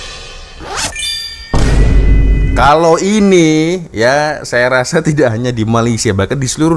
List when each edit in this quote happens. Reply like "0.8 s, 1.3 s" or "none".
none